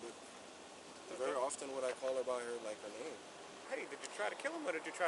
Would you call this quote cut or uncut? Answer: cut